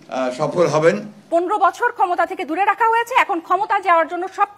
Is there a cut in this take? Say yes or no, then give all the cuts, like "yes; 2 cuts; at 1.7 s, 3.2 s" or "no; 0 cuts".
yes; 1 cut; at 1.1 s